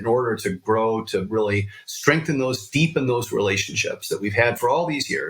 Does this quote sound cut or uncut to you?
uncut